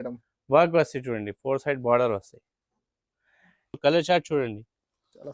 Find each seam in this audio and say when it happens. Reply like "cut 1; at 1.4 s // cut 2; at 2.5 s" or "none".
cut 1; at 3.8 s

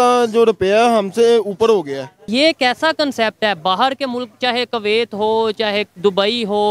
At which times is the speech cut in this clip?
cut 1; at 2.2 s

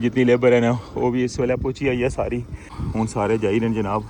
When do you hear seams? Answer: cut 1; at 2.8 s

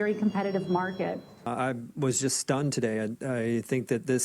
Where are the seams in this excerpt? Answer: cut 1; at 1.3 s

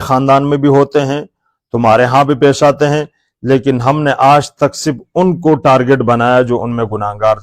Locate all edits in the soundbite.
none

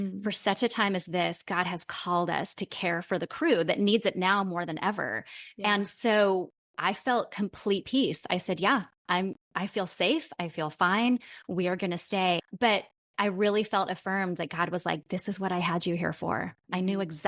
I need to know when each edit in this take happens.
cut 1; at 12.4 s

